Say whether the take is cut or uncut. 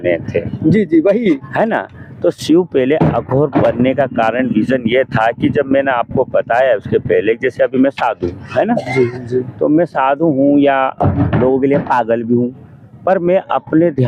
uncut